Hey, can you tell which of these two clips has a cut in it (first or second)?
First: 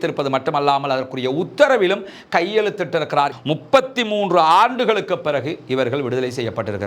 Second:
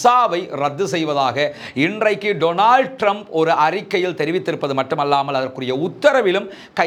first